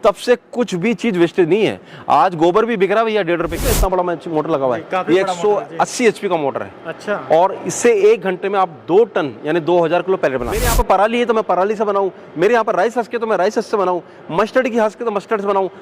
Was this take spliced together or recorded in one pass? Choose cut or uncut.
cut